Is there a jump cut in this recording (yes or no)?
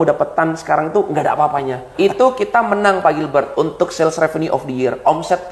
yes